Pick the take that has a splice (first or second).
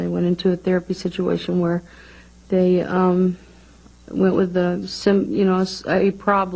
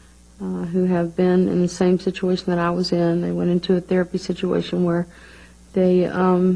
second